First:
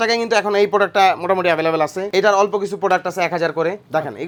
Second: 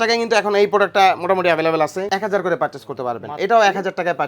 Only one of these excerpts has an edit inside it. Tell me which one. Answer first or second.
second